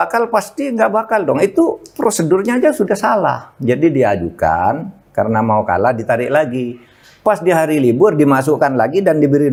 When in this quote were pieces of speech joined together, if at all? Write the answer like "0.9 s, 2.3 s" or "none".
none